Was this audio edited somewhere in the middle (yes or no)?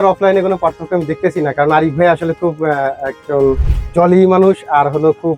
no